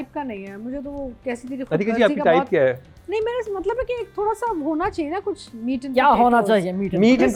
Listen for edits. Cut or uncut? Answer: uncut